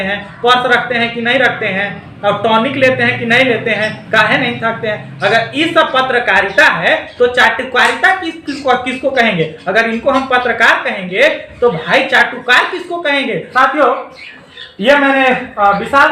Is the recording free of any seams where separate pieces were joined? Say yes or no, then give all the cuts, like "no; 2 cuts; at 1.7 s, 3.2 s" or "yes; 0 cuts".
no; 1 cut; at 13.5 s